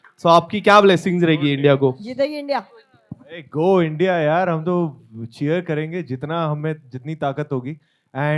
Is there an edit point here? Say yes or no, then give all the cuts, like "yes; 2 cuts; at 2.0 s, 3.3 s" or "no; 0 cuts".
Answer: no; 0 cuts